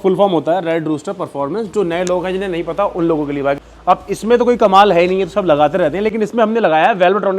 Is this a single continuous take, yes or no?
no